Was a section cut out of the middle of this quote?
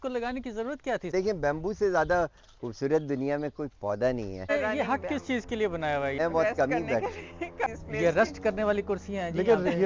yes; 3 cuts; at 1.1 s, 4.5 s, 6.2 s

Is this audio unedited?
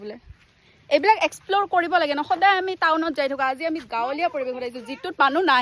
yes; 0 cuts

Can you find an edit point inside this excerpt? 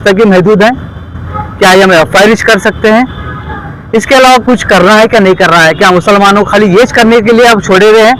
no; 0 cuts

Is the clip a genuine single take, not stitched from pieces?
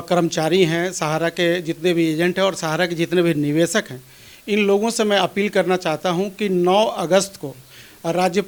yes; 0 cuts

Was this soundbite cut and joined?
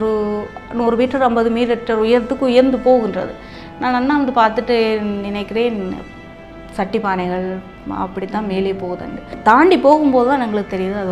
yes; 1 cut; at 9.3 s

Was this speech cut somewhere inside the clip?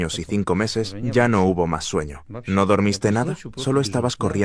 no; 0 cuts

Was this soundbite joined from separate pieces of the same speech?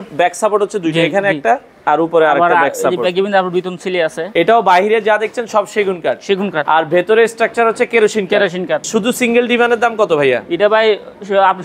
yes; 2 cuts; at 4.2 s, 8.8 s

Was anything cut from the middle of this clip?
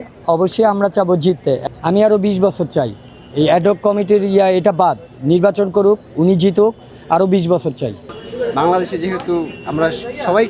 yes; 2 cuts; at 1.7 s, 8.1 s

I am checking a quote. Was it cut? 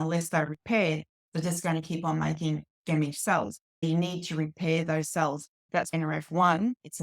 yes; 2 cuts; at 3.8 s, 5.8 s

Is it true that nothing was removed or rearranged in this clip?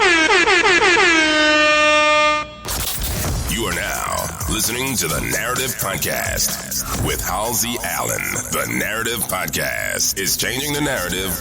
no; 1 cut; at 2.6 s

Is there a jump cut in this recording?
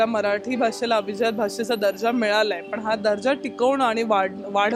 no; 0 cuts

